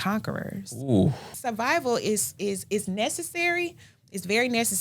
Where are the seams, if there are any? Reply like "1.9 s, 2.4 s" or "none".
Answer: 1.3 s